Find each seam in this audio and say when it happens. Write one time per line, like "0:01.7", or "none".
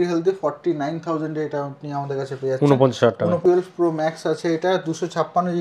0:03.4

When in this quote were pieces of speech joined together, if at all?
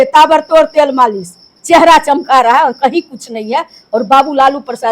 0:01.5

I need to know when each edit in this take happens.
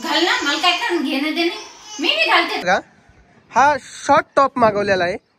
0:02.6

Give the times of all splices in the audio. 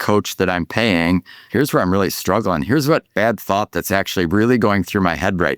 0:01.4
0:03.1

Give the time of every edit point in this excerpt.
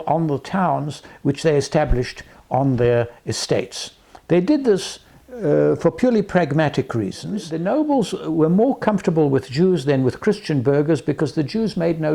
0:07.5

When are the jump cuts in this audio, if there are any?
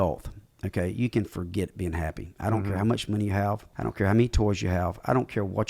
0:03.7

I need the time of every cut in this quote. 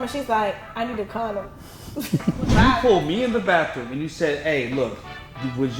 0:02.5

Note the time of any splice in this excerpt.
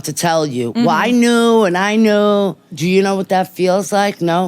0:02.7

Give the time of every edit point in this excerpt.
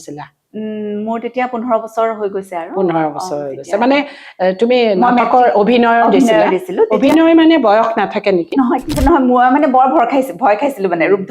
0:08.9

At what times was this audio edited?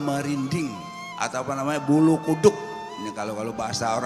none

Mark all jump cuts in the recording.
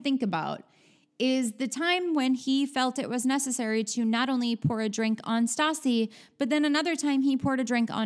none

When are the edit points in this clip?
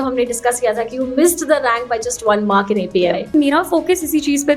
0:03.3

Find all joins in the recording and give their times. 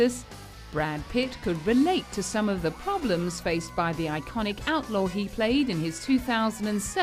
0:05.7

